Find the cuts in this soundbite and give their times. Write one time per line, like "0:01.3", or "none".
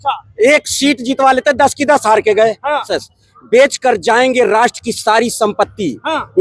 0:03.0